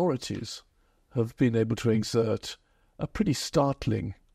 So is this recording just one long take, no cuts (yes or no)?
yes